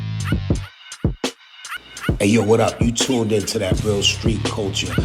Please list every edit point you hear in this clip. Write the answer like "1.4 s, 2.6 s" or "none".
1.7 s